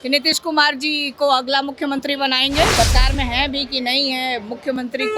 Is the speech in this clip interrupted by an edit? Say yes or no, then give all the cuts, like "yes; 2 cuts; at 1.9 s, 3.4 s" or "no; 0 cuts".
yes; 1 cut; at 2.7 s